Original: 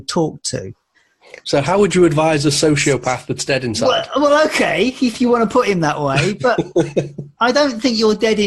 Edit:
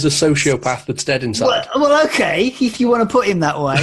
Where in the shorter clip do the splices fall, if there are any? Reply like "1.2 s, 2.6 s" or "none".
none